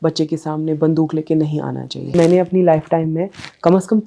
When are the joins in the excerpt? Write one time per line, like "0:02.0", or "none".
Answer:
0:02.1